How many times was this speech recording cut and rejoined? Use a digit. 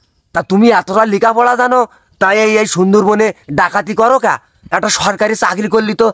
0